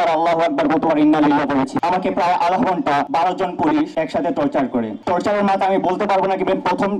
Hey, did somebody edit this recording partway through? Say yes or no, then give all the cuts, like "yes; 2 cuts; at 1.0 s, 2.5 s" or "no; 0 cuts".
yes; 4 cuts; at 1.8 s, 3.1 s, 3.9 s, 5.0 s